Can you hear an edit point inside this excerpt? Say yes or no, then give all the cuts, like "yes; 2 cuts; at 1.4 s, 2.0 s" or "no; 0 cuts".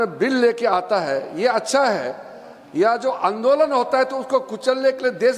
no; 0 cuts